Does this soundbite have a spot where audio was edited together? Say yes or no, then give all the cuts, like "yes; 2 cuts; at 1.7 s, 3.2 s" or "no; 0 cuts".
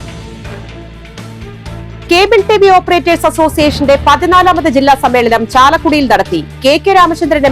yes; 1 cut; at 1.3 s